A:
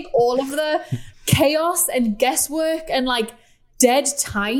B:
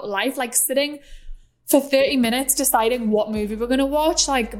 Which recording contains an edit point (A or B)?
A